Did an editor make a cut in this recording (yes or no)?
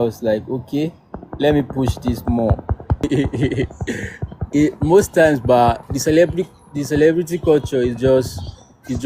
yes